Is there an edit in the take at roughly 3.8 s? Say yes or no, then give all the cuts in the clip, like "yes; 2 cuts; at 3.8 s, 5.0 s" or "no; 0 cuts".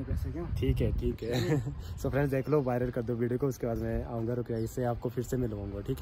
no; 0 cuts